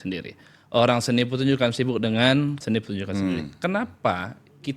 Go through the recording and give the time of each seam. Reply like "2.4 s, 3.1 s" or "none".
2.6 s